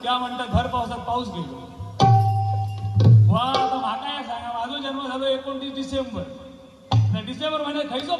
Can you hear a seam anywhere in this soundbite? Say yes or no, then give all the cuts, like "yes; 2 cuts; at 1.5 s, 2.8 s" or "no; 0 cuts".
no; 0 cuts